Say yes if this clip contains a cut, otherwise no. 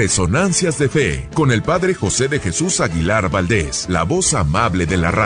yes